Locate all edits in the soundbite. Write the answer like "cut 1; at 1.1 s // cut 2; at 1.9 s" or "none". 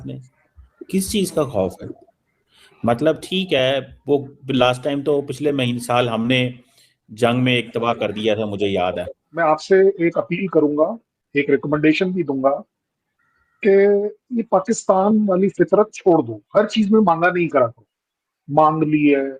cut 1; at 9.2 s